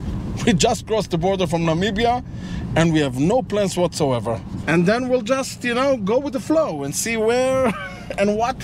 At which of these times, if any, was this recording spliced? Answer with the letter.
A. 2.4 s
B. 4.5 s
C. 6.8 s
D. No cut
B